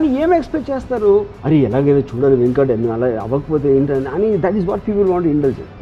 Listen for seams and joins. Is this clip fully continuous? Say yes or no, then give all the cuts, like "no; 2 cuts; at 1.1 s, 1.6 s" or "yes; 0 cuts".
yes; 0 cuts